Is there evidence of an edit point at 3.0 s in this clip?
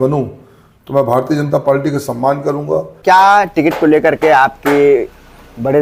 yes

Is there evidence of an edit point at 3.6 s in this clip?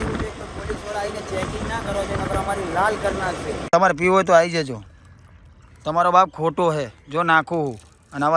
yes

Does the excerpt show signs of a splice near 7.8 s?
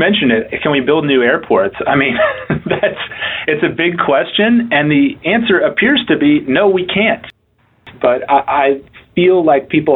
yes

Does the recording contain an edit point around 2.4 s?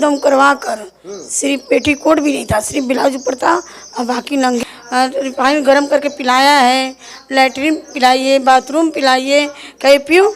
no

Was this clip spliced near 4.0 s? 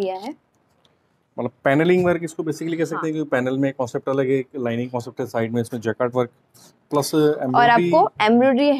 no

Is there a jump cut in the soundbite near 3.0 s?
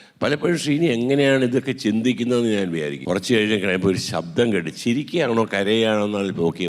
yes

